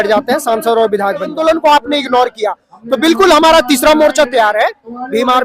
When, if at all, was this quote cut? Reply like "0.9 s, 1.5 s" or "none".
1.4 s